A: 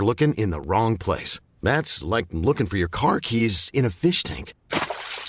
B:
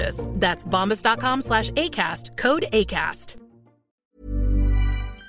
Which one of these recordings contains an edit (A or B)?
B